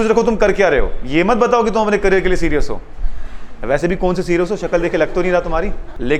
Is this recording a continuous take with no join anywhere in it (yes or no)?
yes